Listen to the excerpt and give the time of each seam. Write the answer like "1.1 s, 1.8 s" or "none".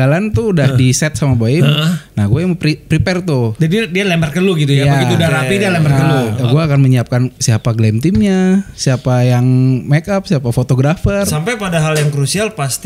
6.4 s, 11.3 s